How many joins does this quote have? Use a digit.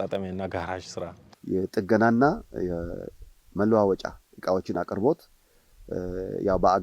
1